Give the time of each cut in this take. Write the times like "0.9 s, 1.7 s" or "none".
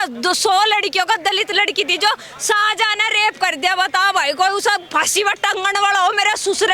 none